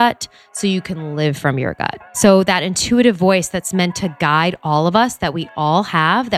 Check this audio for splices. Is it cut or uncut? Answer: cut